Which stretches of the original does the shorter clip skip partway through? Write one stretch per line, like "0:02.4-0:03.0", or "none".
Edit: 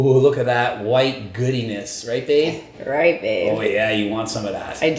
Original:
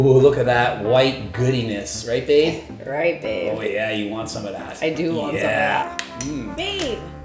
none